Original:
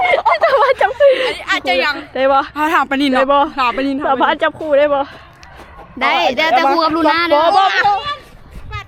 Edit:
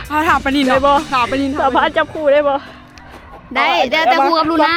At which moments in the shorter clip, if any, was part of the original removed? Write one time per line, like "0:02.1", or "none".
none